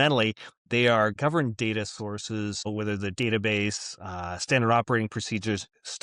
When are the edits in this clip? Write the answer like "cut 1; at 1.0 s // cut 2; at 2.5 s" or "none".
cut 1; at 1.1 s // cut 2; at 2.7 s